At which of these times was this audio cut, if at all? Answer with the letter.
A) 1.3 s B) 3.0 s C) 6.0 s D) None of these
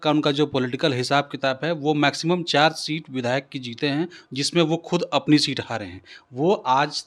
D